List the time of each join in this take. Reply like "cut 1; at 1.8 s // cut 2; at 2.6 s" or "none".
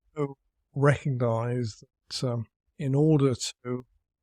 cut 1; at 2.6 s